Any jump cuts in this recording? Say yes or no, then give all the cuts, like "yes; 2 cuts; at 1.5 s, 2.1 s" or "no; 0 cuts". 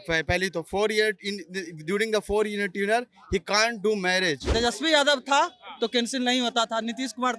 yes; 1 cut; at 4.4 s